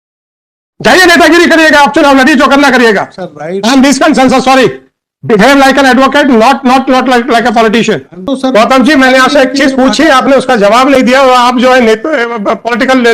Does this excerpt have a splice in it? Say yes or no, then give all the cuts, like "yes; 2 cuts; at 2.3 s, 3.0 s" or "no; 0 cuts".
yes; 1 cut; at 8.3 s